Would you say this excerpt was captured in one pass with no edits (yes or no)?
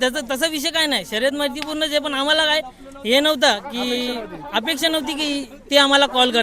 yes